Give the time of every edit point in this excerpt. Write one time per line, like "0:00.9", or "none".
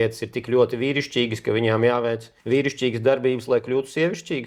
none